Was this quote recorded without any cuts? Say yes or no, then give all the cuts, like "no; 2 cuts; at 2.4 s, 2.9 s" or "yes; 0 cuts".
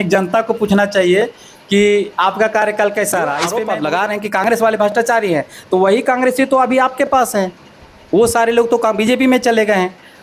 no; 1 cut; at 3.5 s